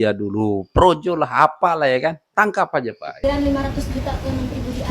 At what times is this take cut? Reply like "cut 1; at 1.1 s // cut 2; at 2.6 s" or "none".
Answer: cut 1; at 3.2 s